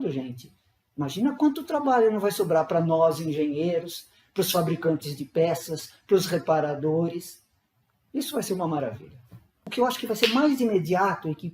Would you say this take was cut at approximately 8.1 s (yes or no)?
no